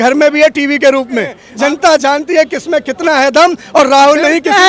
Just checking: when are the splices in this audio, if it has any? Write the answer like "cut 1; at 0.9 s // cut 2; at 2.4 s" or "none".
cut 1; at 1.4 s